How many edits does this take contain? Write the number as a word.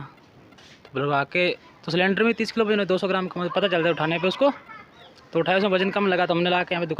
one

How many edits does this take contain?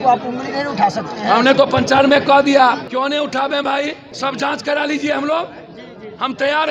two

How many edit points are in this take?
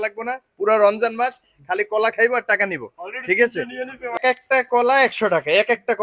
one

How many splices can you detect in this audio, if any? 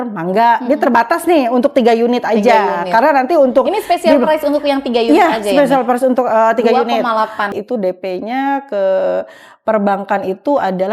one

